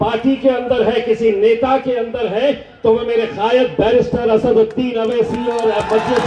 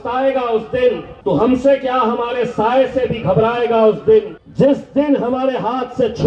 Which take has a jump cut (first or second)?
second